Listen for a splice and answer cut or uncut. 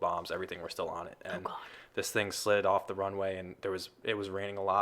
uncut